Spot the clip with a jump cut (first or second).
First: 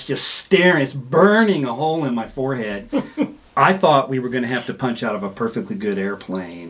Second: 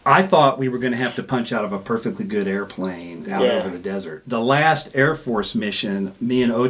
second